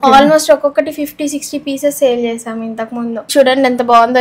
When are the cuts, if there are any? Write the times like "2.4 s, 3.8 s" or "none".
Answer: 3.3 s